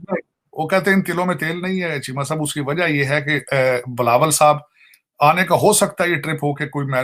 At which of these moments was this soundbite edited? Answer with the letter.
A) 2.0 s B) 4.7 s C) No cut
C